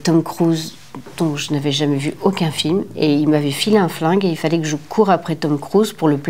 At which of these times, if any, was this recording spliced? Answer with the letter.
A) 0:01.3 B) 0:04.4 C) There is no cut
C